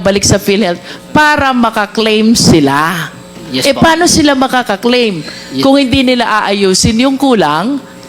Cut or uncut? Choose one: uncut